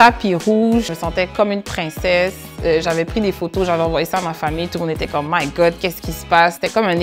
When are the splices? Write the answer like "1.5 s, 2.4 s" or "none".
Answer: 0.9 s